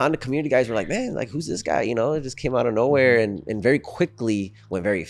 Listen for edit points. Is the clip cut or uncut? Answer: uncut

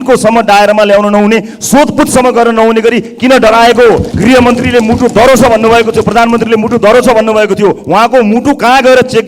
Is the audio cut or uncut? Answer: cut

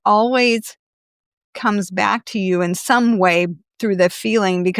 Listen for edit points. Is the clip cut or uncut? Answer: uncut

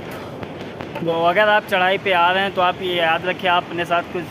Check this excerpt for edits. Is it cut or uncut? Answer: cut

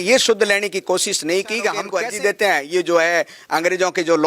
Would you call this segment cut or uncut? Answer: cut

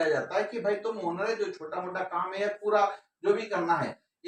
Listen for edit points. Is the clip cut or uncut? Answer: uncut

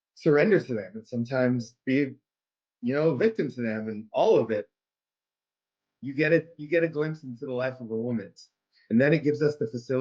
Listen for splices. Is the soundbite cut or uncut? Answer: cut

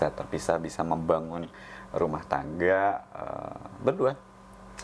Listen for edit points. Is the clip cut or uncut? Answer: uncut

